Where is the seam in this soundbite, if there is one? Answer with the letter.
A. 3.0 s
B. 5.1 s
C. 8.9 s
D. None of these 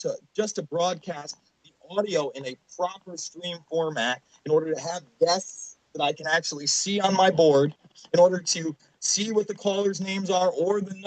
B